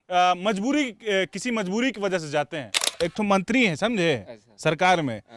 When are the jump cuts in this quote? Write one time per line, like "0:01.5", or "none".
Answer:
0:02.8